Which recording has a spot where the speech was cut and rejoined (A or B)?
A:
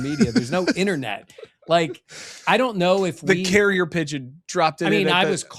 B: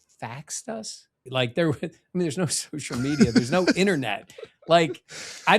B